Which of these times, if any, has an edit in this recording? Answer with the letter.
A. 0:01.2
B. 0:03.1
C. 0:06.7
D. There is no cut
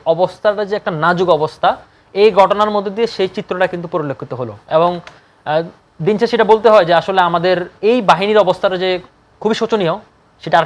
D